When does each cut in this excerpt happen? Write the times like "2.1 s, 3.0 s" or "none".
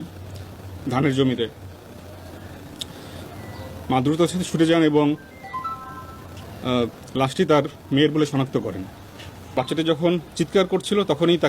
9.4 s